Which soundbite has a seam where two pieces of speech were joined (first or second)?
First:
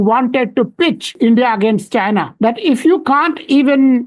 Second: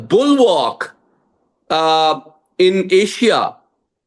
first